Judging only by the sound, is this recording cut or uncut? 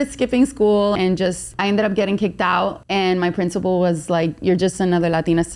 cut